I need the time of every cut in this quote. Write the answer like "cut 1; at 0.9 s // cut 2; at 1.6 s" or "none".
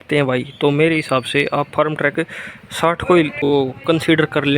cut 1; at 3.5 s